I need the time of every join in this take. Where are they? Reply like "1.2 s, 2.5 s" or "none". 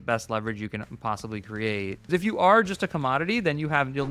2.0 s